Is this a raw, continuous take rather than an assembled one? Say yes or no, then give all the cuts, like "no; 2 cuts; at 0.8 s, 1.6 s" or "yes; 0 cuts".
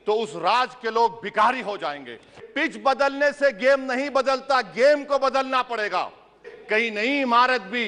no; 2 cuts; at 2.4 s, 6.5 s